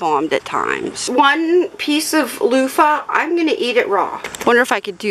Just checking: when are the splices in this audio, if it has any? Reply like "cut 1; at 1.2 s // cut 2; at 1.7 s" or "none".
cut 1; at 1.0 s // cut 2; at 4.1 s